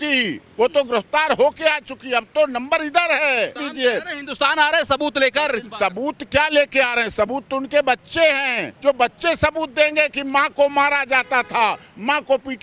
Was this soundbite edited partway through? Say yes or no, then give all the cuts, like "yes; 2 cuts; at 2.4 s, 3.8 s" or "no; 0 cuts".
yes; 1 cut; at 3.7 s